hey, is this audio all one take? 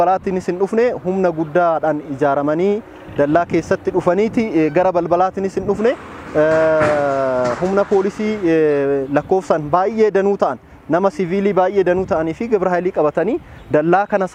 yes; 0 cuts

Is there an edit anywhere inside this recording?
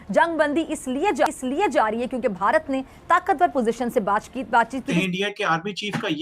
yes; 1 cut; at 4.9 s

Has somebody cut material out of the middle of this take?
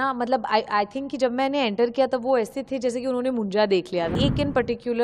yes; 1 cut; at 4.1 s

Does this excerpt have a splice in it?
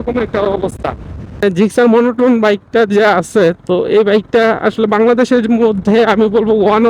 yes; 1 cut; at 1.4 s

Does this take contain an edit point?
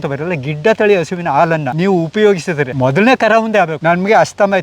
yes; 3 cuts; at 1.7 s, 2.7 s, 3.8 s

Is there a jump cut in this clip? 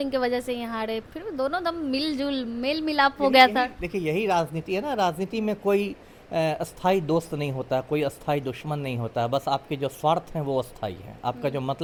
no; 0 cuts

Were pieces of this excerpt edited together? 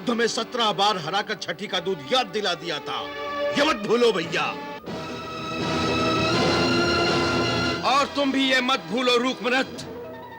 no; 0 cuts

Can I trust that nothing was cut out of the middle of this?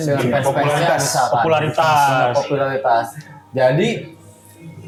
yes; 0 cuts

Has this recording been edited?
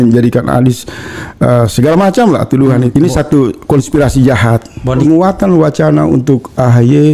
yes; 2 cuts; at 2.9 s, 5.0 s

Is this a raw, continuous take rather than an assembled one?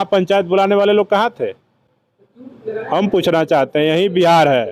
yes; 0 cuts

